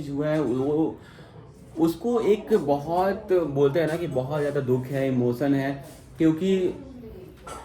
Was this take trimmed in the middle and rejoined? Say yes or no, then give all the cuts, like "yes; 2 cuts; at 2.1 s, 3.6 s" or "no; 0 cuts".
no; 0 cuts